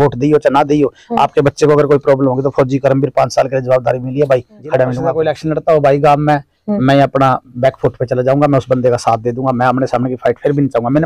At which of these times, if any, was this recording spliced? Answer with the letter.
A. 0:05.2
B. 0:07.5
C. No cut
A